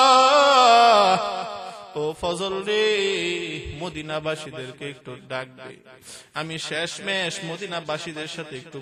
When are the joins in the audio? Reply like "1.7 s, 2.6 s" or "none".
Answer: none